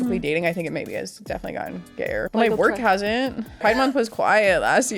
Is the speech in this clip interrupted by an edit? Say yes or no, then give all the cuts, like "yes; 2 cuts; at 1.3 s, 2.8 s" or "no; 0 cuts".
yes; 2 cuts; at 2.3 s, 3.6 s